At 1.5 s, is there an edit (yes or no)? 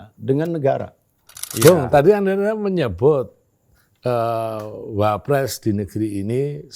yes